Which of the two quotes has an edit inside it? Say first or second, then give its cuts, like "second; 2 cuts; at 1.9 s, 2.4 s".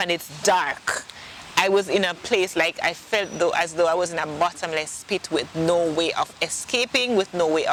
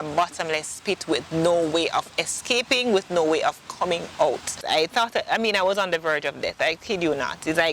second; 1 cut; at 4.6 s